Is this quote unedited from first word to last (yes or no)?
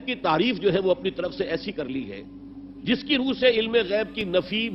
yes